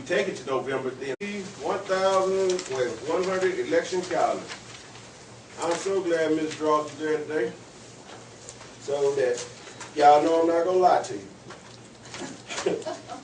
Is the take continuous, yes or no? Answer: yes